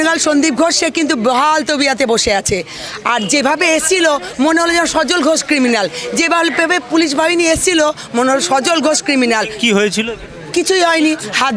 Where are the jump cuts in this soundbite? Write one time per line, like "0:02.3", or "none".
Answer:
none